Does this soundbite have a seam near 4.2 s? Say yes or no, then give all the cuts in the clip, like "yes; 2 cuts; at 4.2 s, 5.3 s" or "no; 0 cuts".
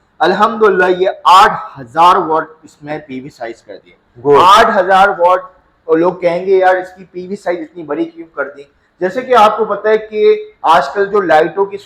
no; 0 cuts